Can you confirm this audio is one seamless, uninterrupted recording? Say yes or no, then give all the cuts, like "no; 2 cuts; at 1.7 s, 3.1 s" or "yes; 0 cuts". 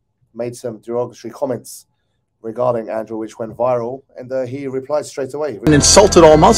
no; 1 cut; at 5.7 s